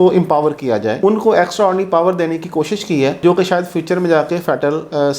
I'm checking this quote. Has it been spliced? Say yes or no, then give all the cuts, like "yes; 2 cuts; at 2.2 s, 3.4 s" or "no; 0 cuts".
no; 0 cuts